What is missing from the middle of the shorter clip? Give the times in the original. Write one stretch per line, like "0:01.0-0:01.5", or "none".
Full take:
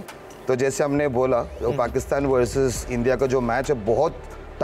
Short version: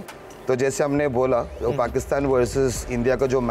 none